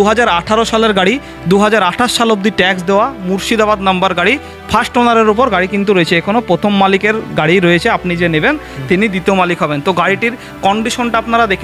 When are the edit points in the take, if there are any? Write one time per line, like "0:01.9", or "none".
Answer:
none